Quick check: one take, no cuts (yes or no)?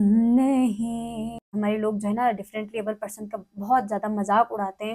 no